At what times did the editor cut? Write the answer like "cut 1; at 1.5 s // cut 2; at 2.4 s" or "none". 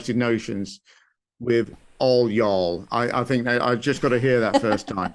none